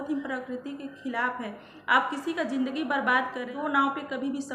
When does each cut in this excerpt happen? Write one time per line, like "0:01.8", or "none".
0:03.5